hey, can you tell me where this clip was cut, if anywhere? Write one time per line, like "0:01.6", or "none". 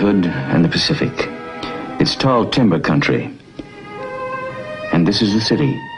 0:01.3